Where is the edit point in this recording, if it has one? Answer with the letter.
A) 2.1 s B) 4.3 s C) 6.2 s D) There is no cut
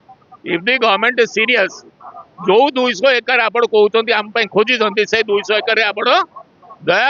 D